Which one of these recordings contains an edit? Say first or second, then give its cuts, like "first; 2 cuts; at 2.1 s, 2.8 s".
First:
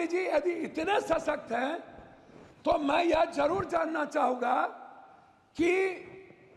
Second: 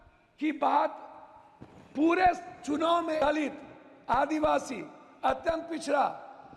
second; 1 cut; at 3.2 s